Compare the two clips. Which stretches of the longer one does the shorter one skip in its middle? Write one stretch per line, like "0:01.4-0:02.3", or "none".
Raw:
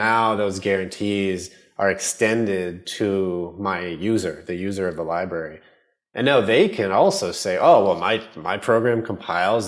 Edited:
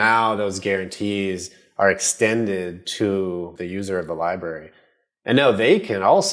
0:03.5-0:04.4

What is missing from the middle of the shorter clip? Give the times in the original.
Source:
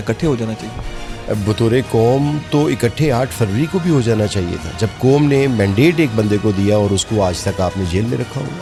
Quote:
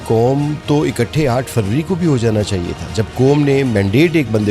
none

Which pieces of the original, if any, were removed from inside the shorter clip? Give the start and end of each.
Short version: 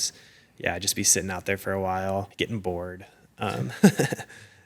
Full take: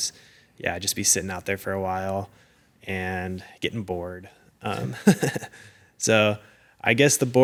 0:02.3-0:03.5

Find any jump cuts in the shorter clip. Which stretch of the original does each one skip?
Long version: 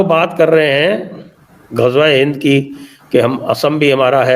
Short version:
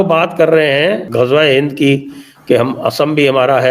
0:01.0-0:01.7

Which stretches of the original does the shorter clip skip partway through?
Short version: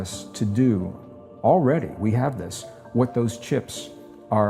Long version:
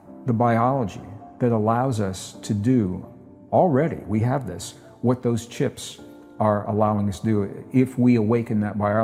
none

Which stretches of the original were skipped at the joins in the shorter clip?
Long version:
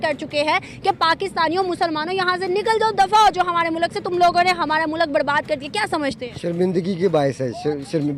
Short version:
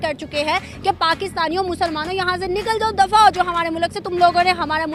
none

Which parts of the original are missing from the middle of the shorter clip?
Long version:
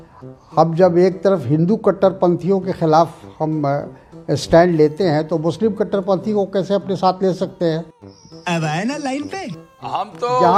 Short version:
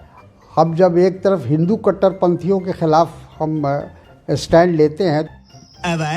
0:05.3-0:07.9

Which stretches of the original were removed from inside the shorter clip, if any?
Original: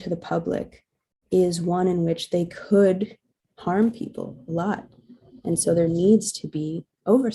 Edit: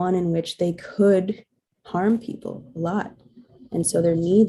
none

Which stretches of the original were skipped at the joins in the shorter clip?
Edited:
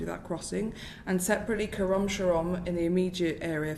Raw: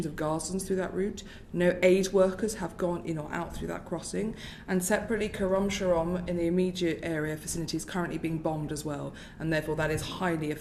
none

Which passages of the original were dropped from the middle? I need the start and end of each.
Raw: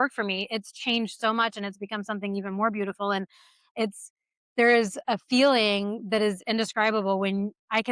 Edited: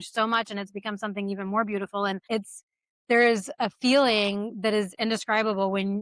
0:03.3-0:03.7

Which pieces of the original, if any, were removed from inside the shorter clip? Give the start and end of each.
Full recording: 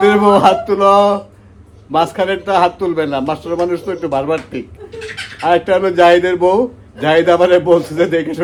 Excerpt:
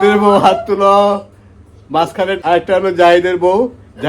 0:02.4-0:05.4

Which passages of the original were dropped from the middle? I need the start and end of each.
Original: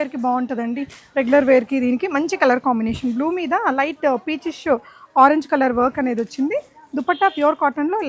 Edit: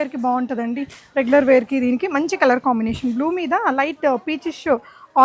none

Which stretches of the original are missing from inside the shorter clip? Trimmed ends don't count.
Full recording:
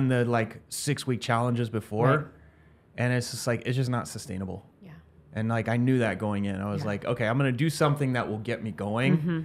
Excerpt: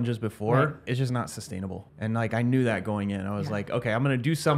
0:02.8-0:04.7

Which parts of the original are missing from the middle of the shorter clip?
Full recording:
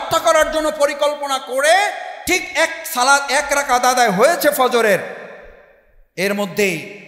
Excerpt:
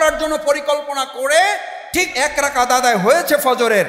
0:02.5-0:03.3

